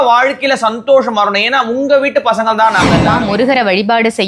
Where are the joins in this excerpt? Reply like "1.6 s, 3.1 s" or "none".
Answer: 3.1 s